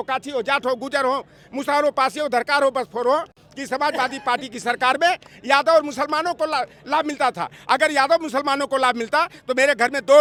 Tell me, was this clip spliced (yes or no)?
no